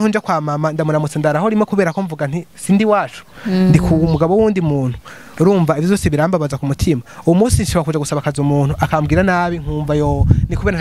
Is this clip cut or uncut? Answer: uncut